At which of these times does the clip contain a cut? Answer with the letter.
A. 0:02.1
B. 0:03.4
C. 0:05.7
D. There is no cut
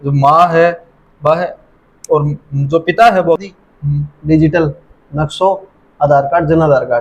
B